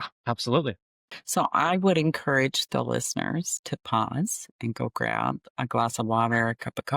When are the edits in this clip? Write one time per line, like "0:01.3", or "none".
0:01.1